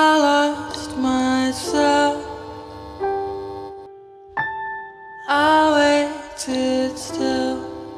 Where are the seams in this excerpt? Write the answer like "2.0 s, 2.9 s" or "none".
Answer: none